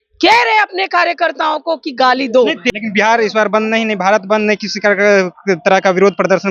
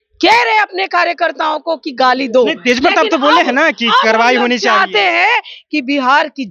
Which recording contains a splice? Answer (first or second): first